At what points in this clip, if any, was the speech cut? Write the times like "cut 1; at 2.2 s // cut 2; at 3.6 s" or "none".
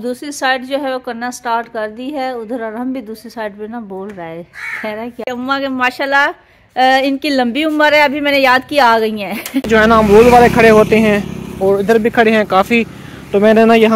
cut 1; at 5.2 s // cut 2; at 9.7 s